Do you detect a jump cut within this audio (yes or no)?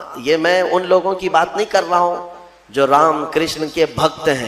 no